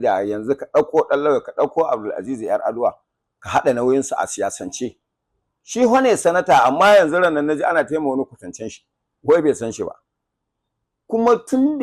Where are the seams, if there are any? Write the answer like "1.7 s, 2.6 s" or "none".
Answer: none